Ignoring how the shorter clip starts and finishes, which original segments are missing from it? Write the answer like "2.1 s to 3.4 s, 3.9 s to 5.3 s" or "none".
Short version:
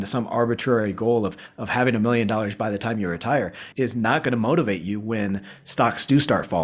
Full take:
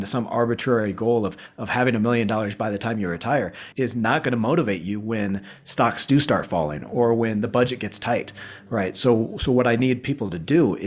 none

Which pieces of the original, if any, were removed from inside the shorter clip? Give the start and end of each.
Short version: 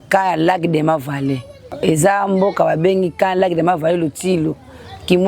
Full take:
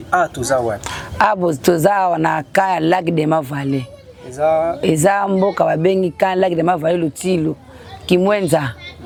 4.2 s to 4.8 s

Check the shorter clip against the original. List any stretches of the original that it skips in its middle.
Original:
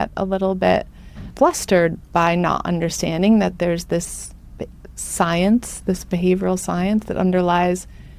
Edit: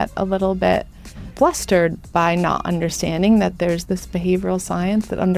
3.8 s to 5.8 s

